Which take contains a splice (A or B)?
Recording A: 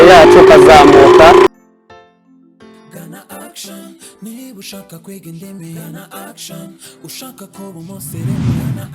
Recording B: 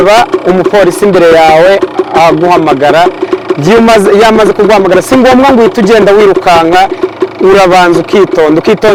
A